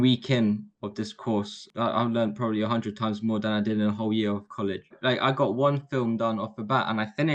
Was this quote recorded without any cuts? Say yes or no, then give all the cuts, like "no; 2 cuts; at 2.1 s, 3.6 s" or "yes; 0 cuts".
no; 2 cuts; at 1.6 s, 5.0 s